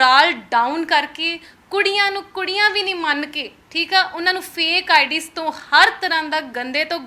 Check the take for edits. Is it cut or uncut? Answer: uncut